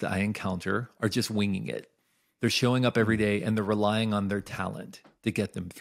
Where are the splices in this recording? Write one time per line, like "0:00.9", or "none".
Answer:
0:00.9